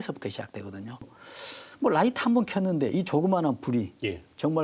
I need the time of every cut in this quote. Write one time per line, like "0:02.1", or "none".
0:01.0